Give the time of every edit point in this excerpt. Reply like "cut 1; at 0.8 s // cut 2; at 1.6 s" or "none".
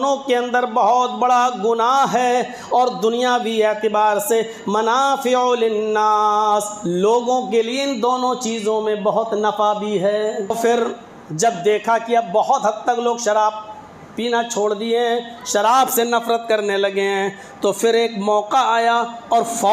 cut 1; at 10.5 s